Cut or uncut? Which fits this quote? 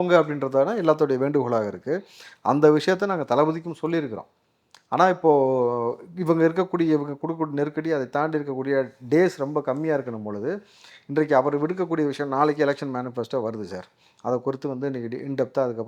uncut